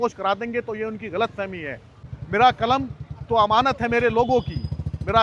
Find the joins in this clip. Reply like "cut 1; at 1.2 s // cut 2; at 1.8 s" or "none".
cut 1; at 1.9 s